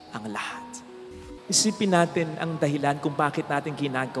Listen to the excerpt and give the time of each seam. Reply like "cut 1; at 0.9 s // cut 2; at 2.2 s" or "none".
cut 1; at 1.2 s